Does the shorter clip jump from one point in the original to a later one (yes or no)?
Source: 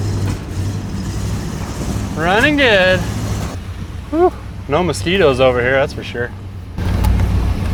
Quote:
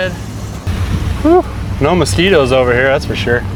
no